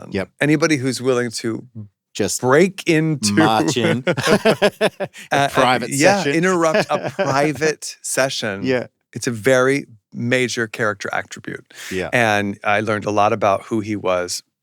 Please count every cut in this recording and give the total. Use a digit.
1